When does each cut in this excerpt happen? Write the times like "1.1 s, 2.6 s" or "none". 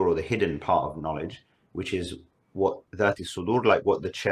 2.8 s